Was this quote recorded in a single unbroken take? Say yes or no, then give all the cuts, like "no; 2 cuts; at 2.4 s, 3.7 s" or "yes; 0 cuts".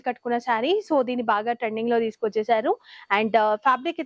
yes; 0 cuts